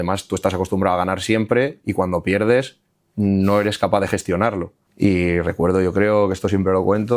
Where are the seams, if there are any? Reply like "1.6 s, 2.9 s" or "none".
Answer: 4.8 s